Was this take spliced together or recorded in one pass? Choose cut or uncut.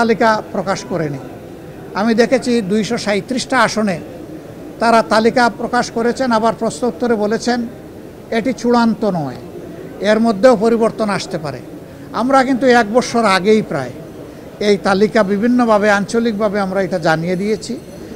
uncut